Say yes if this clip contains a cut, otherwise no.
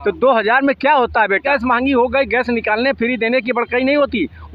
yes